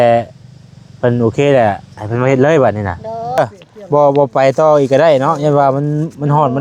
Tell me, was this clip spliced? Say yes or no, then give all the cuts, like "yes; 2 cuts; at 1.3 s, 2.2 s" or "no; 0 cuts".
yes; 1 cut; at 3.4 s